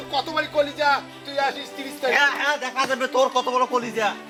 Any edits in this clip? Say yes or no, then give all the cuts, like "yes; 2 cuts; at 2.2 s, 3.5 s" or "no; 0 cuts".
no; 0 cuts